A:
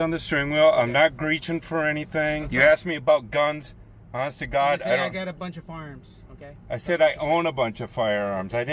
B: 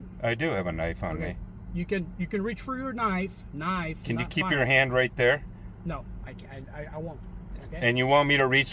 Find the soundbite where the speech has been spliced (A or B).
A